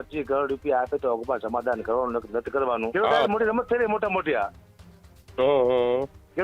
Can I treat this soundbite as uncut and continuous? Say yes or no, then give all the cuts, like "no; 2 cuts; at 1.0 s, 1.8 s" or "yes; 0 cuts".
no; 1 cut; at 2.9 s